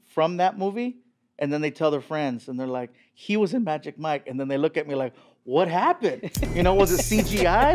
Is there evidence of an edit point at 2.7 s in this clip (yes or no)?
no